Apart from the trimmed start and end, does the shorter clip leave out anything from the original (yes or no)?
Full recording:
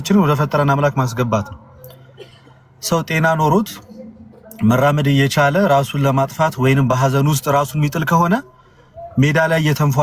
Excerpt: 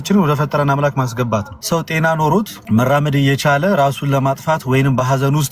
yes